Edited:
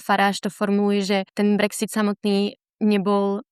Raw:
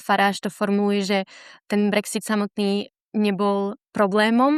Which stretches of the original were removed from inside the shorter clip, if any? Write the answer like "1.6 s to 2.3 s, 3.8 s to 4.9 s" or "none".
1.3 s to 1.6 s